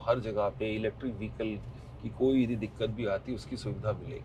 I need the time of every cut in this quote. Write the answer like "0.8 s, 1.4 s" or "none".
none